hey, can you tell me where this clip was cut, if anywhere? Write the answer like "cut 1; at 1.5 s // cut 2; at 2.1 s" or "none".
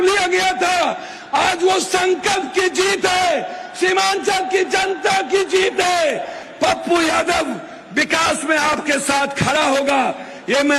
cut 1; at 6.4 s